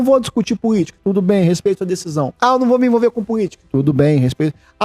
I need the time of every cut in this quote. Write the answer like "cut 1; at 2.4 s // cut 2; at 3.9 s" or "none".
cut 1; at 0.9 s // cut 2; at 2.3 s // cut 3; at 3.6 s